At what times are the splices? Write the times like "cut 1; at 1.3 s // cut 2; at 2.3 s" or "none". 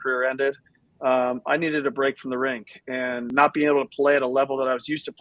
cut 1; at 3.3 s

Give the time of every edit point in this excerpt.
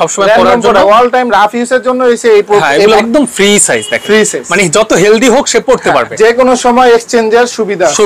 cut 1; at 3.0 s // cut 2; at 6.1 s

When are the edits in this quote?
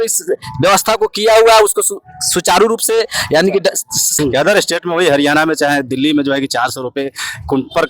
cut 1; at 4.1 s

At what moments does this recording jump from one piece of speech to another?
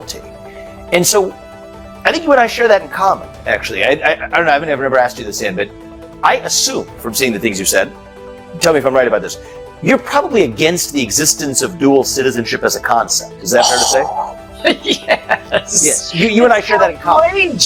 none

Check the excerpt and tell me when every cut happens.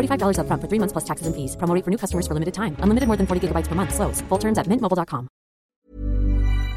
cut 1; at 5.7 s

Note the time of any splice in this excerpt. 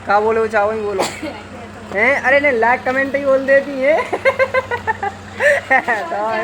none

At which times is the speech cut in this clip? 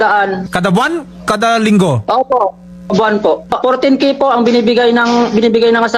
cut 1; at 3.5 s

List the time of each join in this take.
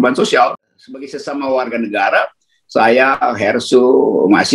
cut 1; at 1.0 s

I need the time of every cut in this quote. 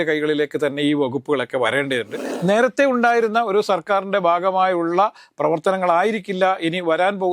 cut 1; at 2.2 s

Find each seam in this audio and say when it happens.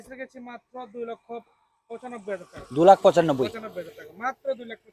none

